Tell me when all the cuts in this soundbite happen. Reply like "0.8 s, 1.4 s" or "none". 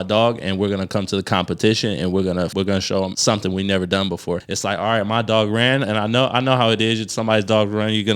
2.7 s, 4.5 s